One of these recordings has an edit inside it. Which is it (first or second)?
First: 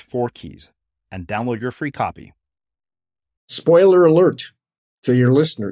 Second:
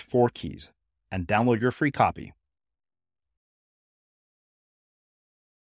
first